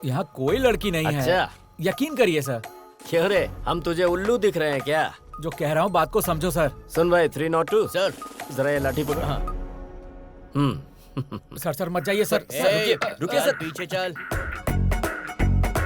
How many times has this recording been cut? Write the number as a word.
one